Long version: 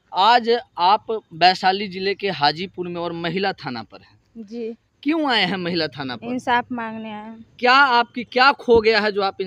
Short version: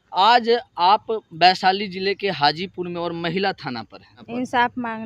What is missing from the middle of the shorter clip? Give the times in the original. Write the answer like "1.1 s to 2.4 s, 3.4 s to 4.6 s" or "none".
4.2 s to 6.1 s